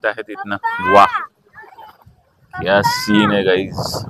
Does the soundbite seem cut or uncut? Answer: uncut